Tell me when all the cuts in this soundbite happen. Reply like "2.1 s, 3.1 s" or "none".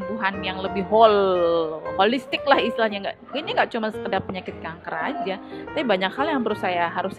none